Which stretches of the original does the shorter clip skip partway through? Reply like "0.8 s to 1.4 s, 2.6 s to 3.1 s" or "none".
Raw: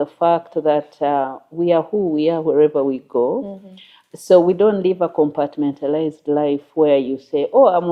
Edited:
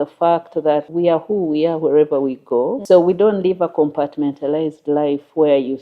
0.9 s to 1.5 s, 3.4 s to 4.2 s